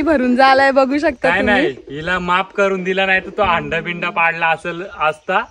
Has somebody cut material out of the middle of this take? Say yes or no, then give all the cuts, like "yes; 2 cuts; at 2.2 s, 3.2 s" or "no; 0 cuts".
no; 0 cuts